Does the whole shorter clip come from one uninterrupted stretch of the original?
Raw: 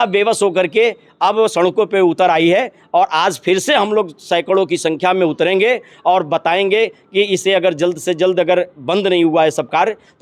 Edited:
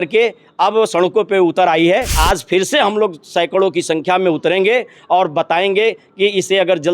no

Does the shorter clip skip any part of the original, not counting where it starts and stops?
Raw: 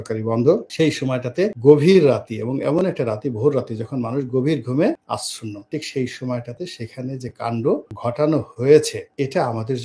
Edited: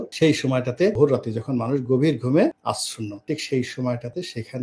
yes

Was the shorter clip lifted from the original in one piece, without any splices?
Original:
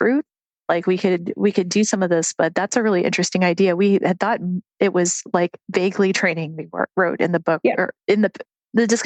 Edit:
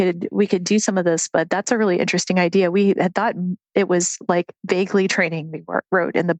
yes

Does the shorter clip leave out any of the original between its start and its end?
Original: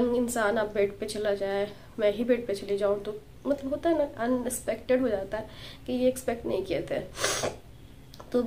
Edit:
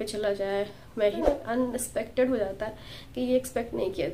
yes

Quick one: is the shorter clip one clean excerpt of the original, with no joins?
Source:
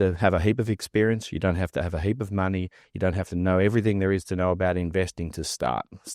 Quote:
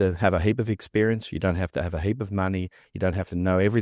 yes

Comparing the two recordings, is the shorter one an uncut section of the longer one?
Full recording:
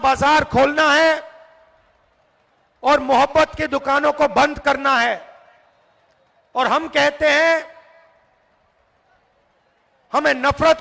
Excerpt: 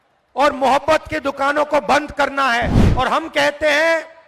no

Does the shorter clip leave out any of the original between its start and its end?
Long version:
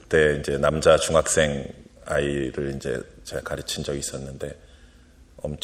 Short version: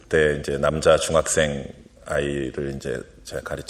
no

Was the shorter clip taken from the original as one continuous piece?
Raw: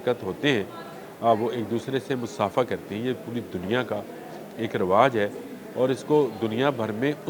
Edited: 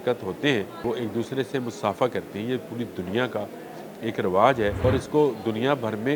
no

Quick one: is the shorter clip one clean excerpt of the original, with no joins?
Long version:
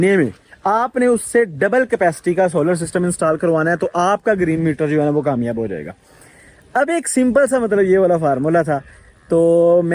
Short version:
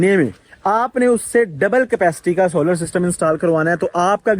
yes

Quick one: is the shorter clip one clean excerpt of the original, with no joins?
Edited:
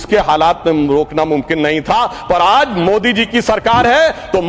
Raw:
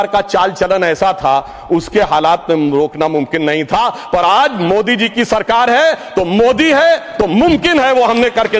yes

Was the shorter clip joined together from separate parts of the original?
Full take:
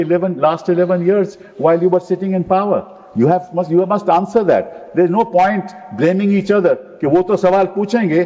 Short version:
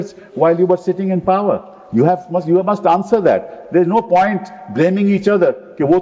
no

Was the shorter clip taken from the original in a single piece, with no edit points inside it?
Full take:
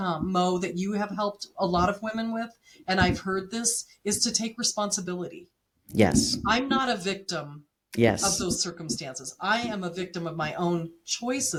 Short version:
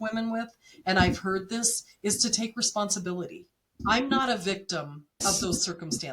no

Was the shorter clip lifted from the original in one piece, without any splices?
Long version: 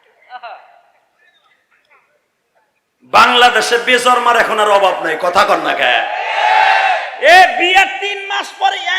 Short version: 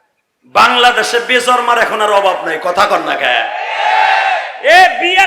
yes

